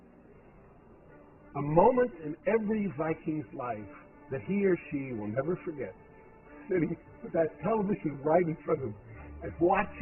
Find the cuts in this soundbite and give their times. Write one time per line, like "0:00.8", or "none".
0:03.8